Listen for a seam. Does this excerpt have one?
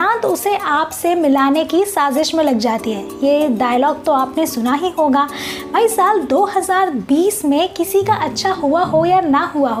no; 0 cuts

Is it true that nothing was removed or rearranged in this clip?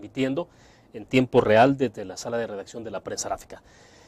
yes; 0 cuts

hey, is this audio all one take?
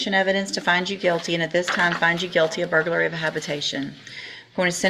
yes; 0 cuts

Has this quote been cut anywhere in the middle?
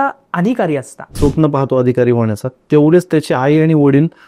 yes; 1 cut; at 1.1 s

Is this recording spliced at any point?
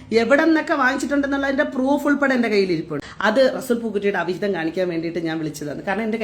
yes; 1 cut; at 3.3 s

